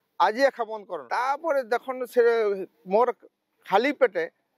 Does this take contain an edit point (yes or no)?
yes